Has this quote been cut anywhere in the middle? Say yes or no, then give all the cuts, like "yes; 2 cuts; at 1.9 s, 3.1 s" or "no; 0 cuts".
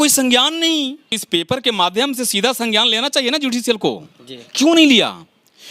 yes; 1 cut; at 1.1 s